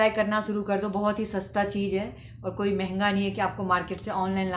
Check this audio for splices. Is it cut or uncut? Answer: uncut